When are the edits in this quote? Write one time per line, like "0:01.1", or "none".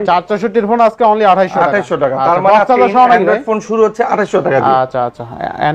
none